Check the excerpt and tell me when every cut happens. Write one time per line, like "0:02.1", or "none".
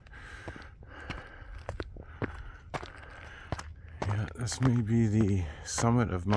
0:03.1